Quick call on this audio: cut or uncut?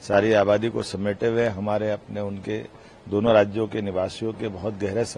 uncut